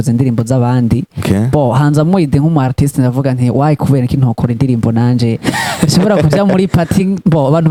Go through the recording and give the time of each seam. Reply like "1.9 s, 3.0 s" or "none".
none